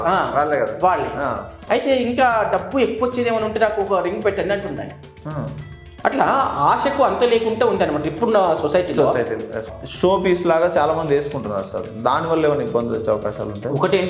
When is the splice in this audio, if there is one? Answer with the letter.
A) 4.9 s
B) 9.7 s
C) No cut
B